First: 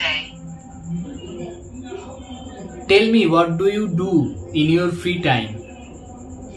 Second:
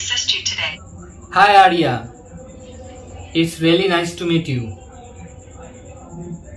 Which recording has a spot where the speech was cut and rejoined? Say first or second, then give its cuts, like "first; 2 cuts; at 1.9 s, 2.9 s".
first; 1 cut; at 1.1 s